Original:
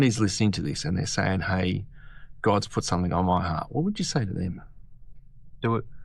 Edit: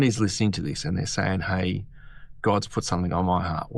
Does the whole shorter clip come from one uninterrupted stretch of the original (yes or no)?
yes